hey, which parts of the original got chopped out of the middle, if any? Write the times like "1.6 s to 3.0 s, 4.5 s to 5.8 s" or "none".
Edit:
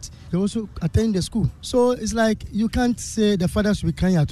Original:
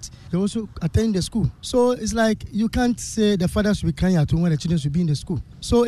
none

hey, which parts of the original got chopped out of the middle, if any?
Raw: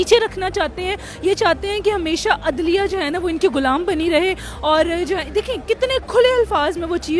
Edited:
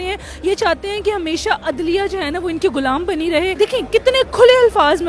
4.3 s to 5.3 s

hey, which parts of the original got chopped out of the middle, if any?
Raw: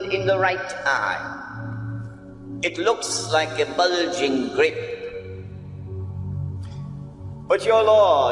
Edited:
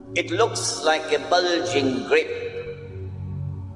5.3 s to 5.8 s

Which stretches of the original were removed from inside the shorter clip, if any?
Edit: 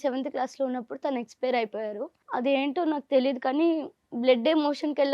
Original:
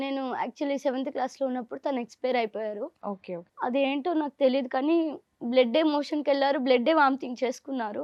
3.0 s to 3.4 s

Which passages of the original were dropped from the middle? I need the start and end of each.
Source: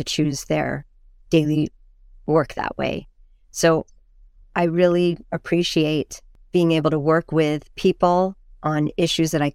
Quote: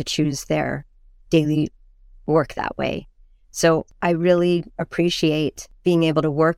3.9 s to 4.4 s, 6.2 s to 6.3 s

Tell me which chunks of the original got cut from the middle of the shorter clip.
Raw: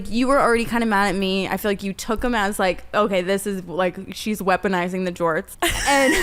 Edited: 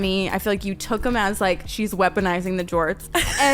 2.8 s to 4.1 s

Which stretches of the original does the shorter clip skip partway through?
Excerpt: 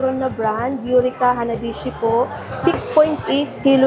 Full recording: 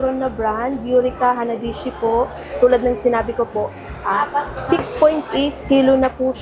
2.5 s to 4.5 s

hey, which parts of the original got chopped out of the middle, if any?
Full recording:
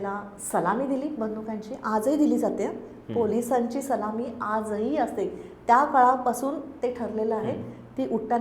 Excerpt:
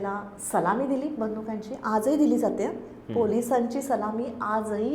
none

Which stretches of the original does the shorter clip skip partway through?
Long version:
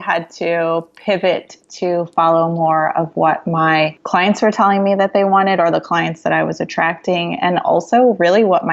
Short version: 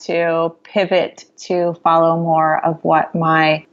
none

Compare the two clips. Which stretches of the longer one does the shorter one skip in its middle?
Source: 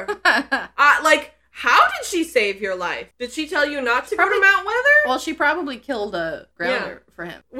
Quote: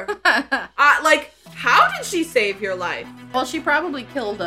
3.3 s to 5.1 s

